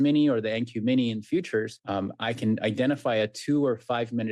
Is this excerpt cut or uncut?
cut